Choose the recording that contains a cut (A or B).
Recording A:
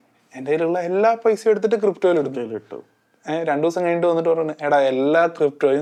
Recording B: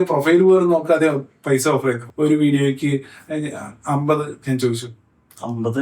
B